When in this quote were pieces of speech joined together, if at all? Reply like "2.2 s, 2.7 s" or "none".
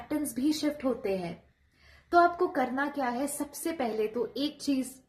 none